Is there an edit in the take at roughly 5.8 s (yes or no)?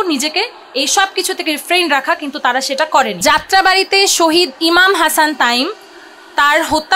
no